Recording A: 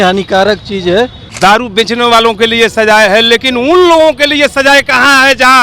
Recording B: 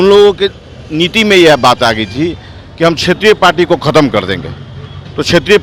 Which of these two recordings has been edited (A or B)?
A